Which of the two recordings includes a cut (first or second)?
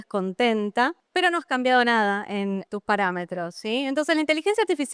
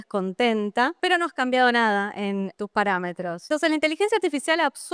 second